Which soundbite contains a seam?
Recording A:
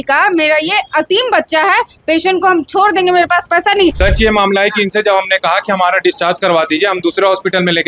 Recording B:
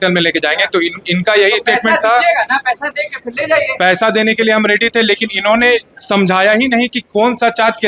A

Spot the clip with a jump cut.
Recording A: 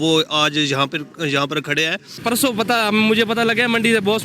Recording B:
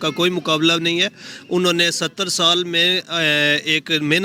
A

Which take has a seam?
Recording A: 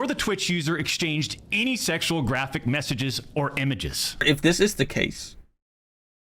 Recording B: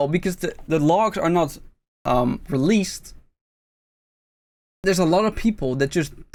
A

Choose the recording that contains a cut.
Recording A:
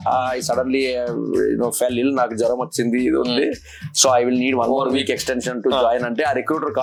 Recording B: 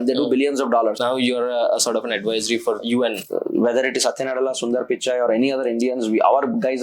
B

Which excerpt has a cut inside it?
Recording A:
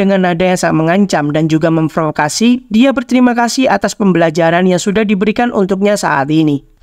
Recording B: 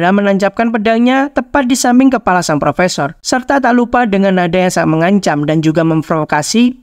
B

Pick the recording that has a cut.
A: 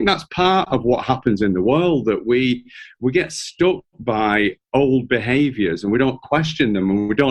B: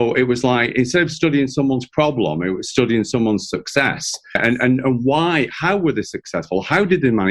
B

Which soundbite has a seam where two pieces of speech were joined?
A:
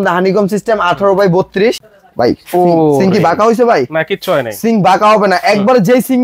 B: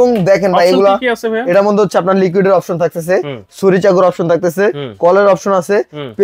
A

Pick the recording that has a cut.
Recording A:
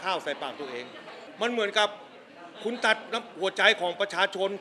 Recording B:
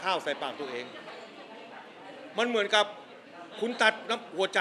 A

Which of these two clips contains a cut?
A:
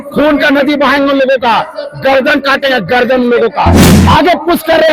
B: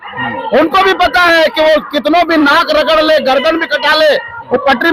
A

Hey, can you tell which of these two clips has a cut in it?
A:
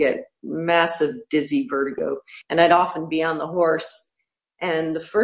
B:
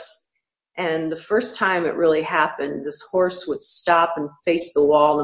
A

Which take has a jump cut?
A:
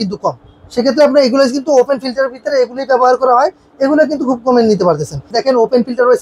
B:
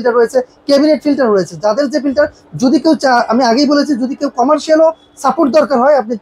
A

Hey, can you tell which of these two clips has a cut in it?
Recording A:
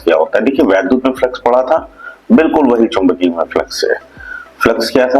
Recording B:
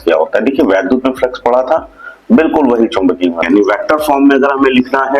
B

